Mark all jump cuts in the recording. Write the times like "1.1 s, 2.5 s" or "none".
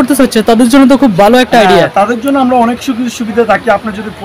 none